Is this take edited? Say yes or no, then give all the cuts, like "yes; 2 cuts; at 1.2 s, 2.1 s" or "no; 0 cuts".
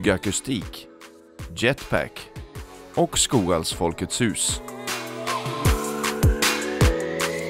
yes; 1 cut; at 4.5 s